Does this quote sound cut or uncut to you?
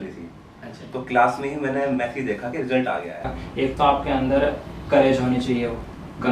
cut